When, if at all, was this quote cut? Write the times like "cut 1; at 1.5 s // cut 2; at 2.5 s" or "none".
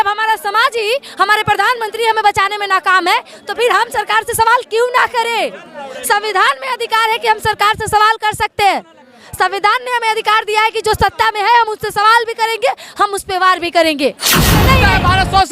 cut 1; at 14.6 s